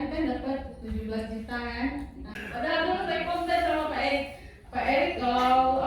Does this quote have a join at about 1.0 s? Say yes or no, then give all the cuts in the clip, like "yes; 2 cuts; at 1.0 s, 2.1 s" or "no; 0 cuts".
no; 1 cut; at 2.4 s